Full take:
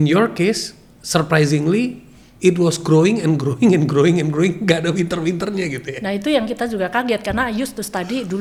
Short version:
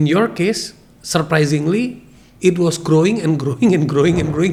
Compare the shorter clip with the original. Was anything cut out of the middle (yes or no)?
no